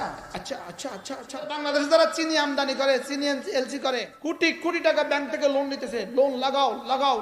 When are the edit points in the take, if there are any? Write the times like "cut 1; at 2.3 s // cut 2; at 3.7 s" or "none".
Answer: cut 1; at 1.6 s // cut 2; at 4.1 s